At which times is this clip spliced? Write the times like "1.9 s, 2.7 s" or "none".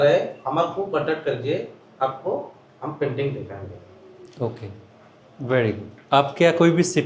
none